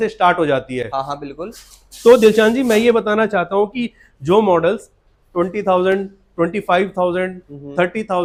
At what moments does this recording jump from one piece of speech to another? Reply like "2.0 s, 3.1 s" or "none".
none

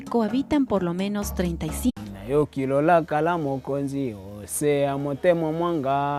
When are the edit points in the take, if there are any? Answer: none

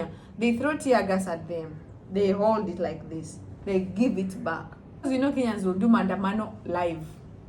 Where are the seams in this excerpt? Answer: 5.0 s

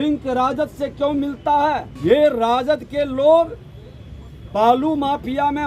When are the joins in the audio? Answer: 1.9 s

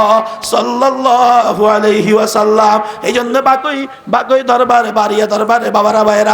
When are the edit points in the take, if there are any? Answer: 1.0 s

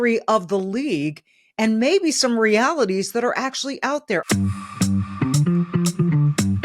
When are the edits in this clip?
4.2 s

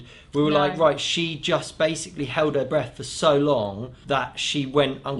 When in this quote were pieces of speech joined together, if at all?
3.9 s

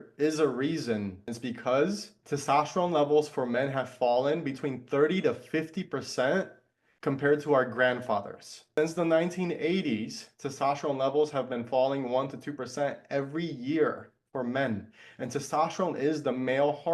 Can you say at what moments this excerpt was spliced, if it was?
1.3 s, 2.1 s, 8.8 s

